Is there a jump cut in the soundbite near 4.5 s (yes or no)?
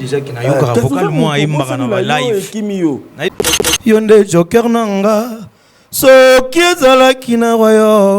no